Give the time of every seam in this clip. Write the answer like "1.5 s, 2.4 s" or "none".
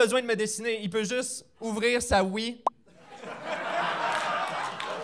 none